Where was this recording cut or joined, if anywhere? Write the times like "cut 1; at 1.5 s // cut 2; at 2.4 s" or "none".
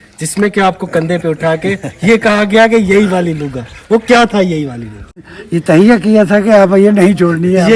cut 1; at 5.2 s